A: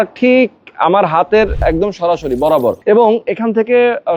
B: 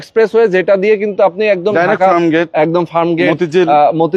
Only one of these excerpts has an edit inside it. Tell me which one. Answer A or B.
A